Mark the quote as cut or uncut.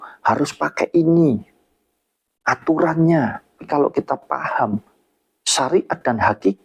cut